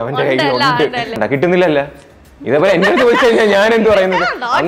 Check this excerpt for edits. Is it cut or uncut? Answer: cut